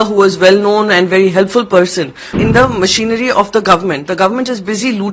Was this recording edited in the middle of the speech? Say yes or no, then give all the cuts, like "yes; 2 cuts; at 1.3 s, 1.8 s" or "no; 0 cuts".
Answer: yes; 1 cut; at 2.4 s